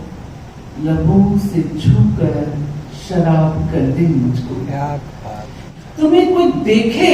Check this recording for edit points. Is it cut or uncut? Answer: cut